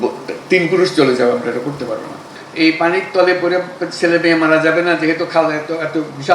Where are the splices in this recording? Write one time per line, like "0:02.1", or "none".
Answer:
0:02.4